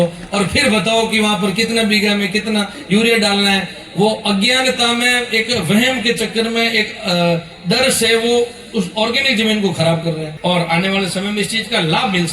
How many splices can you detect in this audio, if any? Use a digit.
1